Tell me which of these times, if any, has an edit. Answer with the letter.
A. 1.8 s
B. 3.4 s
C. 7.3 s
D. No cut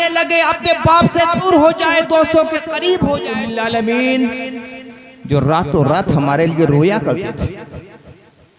B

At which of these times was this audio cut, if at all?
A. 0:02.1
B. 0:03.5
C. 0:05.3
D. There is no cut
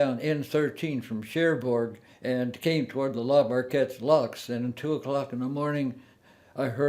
A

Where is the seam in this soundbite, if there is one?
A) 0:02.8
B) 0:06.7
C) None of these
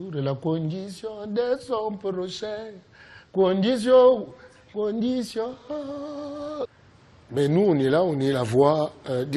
B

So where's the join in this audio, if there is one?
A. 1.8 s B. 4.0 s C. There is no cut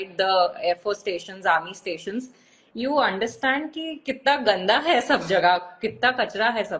C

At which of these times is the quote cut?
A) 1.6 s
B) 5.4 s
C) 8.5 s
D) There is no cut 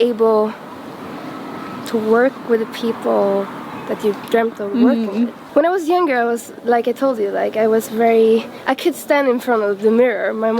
B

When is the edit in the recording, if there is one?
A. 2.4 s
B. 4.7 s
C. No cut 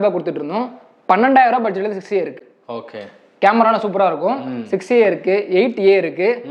C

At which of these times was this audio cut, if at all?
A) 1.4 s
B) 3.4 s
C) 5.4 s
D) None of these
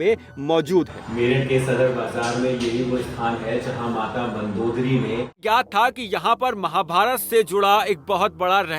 C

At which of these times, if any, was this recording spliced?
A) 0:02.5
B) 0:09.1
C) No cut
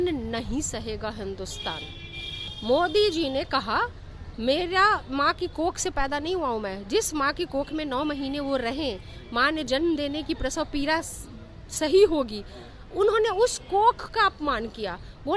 A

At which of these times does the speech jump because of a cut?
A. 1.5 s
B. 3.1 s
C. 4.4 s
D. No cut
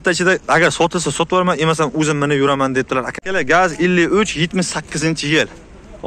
B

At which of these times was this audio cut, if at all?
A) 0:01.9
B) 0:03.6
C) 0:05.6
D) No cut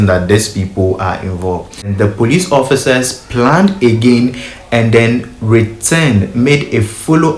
A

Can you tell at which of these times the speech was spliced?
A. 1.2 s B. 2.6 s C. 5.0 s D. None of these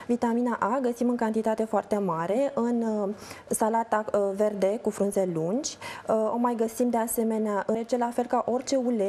B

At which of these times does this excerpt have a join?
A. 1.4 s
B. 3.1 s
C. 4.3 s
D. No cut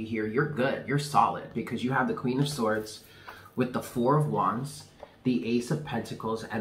D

